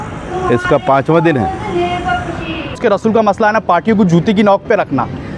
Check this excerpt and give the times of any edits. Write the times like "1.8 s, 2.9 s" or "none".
2.8 s